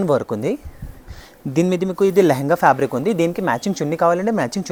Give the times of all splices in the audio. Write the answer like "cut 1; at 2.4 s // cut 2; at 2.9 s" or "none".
none